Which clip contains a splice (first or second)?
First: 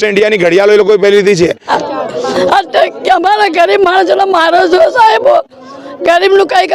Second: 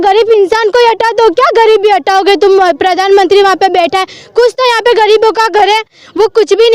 first